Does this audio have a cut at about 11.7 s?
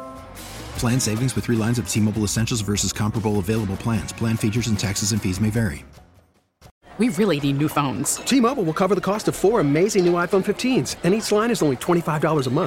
no; 1 cut; at 6.8 s

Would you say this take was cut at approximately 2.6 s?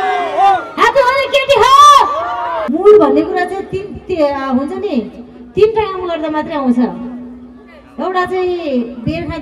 yes; 1 cut; at 2.6 s

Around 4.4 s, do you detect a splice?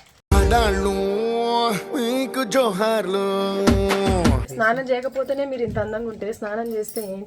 yes; 1 cut; at 4.4 s

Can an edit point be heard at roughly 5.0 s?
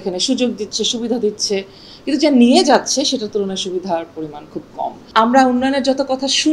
yes; 1 cut; at 5.0 s

